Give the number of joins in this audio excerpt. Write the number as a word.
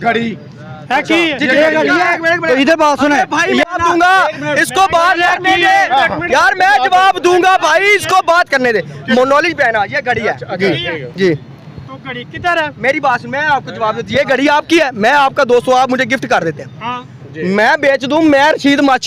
zero